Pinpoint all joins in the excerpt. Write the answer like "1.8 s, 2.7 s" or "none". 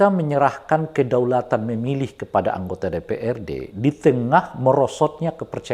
none